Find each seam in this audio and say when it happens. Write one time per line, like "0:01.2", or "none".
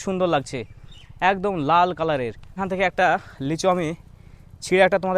0:02.6